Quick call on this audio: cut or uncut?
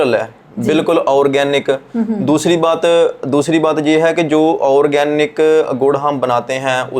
uncut